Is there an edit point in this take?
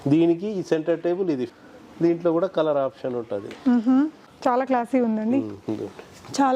yes; 2 cuts; at 1.4 s, 4.2 s

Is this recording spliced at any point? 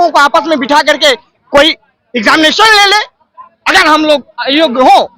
no; 0 cuts

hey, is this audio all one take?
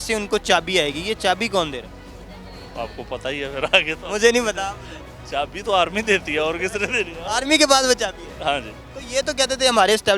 yes; 0 cuts

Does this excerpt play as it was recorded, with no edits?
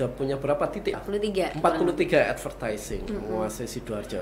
no; 1 cut; at 1.0 s

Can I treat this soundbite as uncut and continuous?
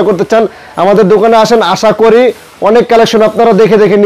yes; 0 cuts

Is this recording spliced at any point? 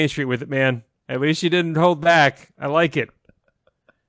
no; 0 cuts

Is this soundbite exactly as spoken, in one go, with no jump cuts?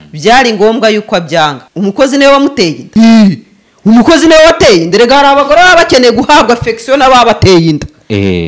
no; 2 cuts; at 1.6 s, 2.8 s

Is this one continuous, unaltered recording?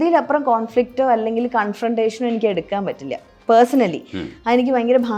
yes; 0 cuts

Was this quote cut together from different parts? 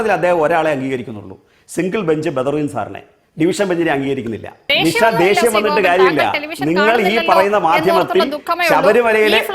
yes; 1 cut; at 4.5 s

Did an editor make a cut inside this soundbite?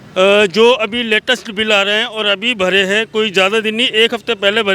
no; 0 cuts

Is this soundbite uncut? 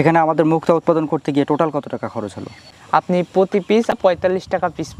no; 2 cuts; at 2.6 s, 3.9 s

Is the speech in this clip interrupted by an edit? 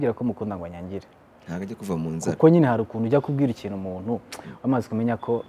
no; 0 cuts

